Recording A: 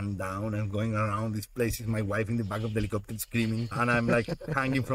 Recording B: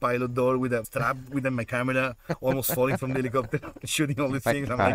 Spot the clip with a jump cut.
A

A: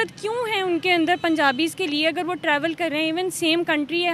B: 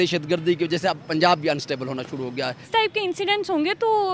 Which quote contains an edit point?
B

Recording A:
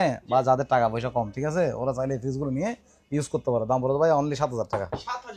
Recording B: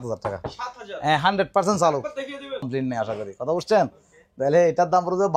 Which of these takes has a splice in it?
B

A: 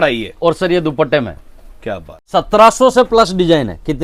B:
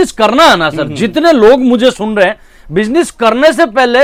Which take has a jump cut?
A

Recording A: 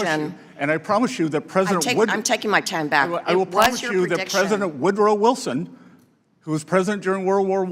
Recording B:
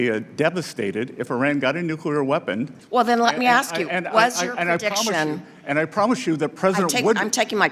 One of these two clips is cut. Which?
B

